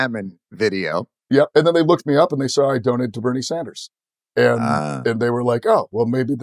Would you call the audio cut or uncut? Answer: cut